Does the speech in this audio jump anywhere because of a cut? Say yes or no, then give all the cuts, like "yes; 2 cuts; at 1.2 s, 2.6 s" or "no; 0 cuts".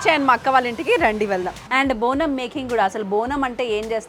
yes; 1 cut; at 1.6 s